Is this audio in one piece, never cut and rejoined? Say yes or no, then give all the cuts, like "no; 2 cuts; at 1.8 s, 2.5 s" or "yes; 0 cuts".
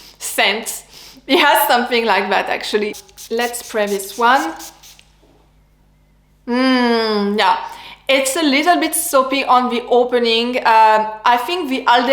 no; 1 cut; at 3.0 s